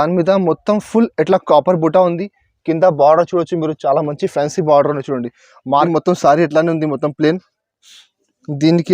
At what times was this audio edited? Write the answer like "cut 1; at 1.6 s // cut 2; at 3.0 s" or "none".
cut 1; at 5.9 s